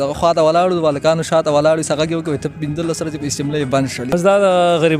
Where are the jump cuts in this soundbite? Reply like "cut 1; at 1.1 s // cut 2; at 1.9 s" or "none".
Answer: cut 1; at 4.1 s

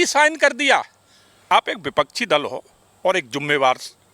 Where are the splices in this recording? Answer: cut 1; at 1.4 s

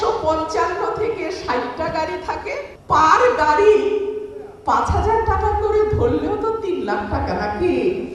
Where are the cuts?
none

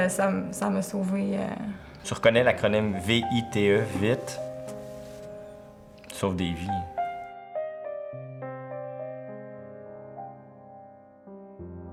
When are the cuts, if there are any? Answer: none

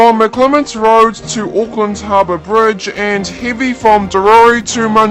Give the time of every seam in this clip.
none

